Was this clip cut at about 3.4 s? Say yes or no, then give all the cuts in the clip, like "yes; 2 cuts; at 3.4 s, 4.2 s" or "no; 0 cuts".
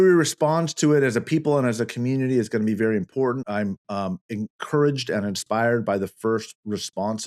yes; 1 cut; at 3.4 s